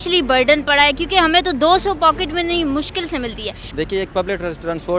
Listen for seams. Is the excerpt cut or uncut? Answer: cut